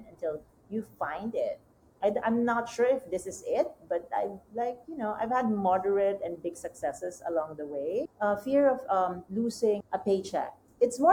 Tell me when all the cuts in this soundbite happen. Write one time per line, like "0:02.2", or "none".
none